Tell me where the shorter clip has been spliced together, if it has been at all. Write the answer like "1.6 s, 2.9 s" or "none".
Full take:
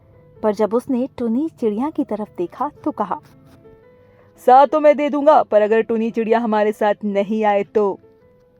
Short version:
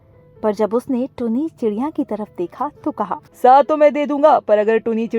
3.3 s